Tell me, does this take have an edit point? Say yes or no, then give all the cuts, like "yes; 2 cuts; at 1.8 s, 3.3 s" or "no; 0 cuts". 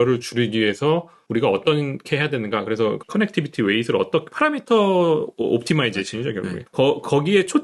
yes; 3 cuts; at 1.2 s, 3.0 s, 6.6 s